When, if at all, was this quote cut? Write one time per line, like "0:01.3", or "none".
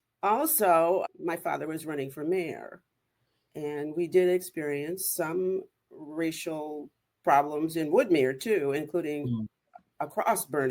0:01.0
0:09.9